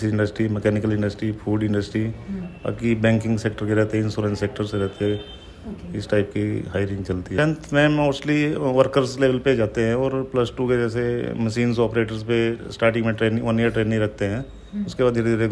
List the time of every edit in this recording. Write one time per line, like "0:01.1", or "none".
0:07.3